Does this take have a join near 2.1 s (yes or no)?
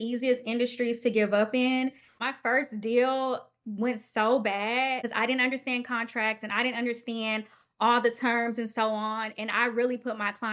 yes